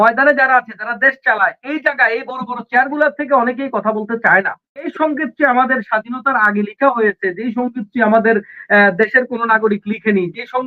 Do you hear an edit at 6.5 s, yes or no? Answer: no